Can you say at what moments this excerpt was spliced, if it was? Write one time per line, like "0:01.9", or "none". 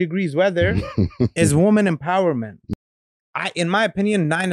0:02.6